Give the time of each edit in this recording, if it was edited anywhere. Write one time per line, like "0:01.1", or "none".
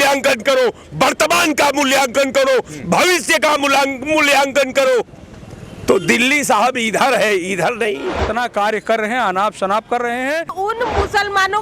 0:08.1
0:10.5